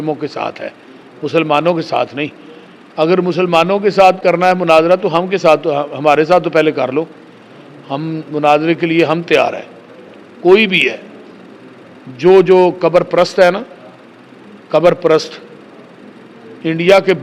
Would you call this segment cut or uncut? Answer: uncut